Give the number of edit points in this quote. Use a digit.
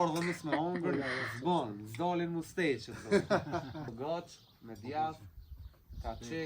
1